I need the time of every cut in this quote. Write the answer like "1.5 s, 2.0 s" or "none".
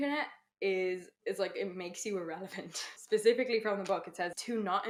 none